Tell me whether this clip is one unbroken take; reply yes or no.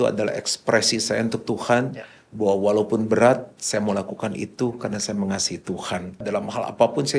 no